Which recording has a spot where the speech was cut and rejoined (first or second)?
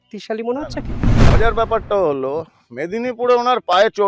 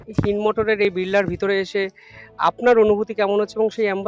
first